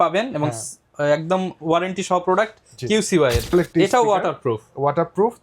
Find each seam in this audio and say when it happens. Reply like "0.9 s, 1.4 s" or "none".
3.5 s